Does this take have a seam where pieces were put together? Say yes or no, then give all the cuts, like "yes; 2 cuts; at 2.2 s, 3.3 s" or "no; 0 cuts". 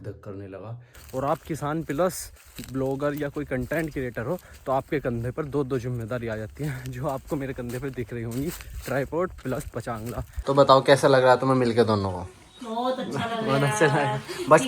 yes; 2 cuts; at 1.0 s, 10.3 s